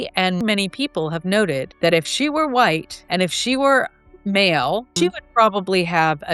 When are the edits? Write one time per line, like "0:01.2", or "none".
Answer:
0:01.7
0:02.9
0:04.9